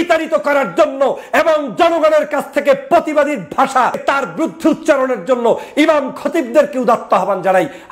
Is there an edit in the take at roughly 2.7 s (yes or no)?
no